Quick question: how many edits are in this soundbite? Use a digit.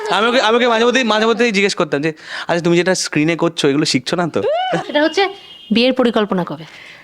1